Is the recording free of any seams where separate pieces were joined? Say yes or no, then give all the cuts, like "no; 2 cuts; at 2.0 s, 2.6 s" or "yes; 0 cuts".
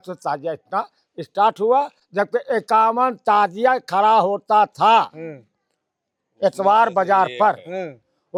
yes; 0 cuts